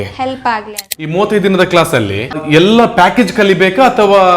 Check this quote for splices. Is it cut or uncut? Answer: cut